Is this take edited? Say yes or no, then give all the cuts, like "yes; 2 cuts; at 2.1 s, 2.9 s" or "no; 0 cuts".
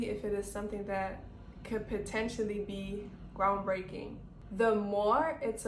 no; 0 cuts